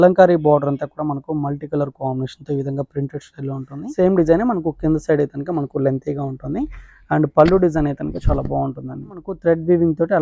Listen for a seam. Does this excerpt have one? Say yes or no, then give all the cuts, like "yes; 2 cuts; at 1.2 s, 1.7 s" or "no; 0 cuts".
yes; 2 cuts; at 3.7 s, 9.3 s